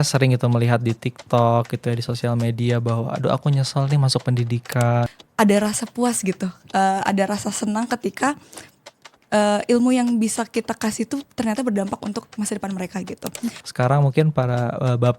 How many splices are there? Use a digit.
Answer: 2